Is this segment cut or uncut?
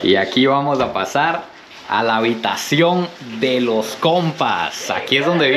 uncut